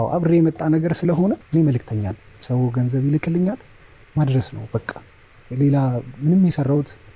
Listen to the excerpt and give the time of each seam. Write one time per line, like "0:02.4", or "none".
0:01.4